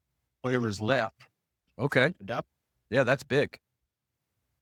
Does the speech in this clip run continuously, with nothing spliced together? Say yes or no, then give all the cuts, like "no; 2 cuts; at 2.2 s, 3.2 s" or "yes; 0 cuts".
yes; 0 cuts